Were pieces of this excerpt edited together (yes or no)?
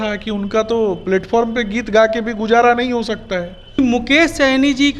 yes